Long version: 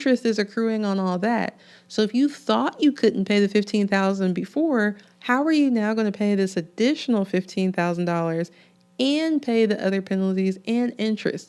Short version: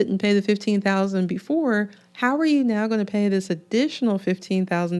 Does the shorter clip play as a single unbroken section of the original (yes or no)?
yes